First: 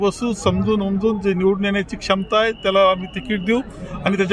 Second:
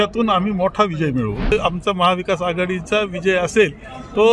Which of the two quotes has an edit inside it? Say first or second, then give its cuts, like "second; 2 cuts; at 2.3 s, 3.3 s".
second; 1 cut; at 1.5 s